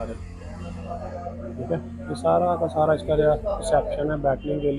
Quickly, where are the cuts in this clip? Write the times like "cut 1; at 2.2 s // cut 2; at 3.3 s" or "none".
none